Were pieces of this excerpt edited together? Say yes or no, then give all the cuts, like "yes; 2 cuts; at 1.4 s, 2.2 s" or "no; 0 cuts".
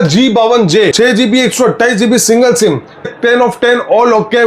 yes; 2 cuts; at 0.9 s, 3.1 s